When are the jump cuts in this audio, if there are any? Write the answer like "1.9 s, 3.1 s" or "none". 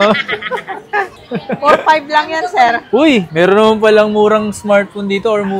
1.3 s